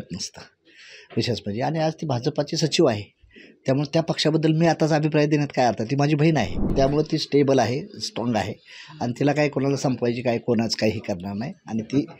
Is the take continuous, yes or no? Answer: no